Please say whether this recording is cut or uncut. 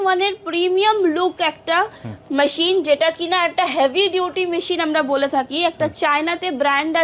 uncut